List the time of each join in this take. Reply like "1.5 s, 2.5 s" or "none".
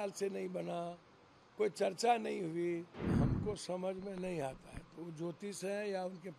3.1 s